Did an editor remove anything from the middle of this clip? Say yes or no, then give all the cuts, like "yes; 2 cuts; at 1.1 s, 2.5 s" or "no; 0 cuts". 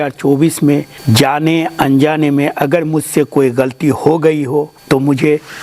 yes; 2 cuts; at 0.9 s, 4.8 s